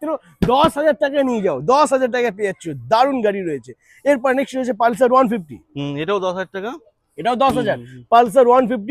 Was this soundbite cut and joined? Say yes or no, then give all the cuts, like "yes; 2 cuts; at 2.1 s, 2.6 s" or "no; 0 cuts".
no; 0 cuts